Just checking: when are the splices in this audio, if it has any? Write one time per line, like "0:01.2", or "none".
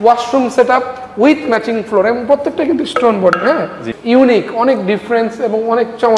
0:03.9